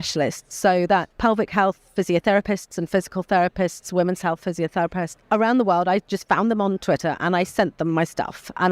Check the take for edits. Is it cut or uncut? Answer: cut